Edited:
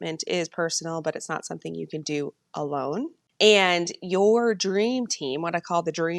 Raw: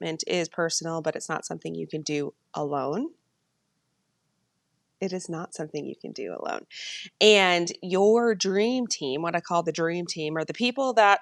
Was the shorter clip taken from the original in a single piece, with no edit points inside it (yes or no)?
no